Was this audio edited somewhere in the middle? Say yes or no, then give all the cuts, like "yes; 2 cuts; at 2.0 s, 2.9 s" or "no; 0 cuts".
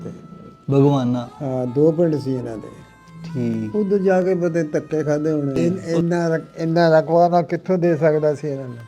yes; 1 cut; at 5.5 s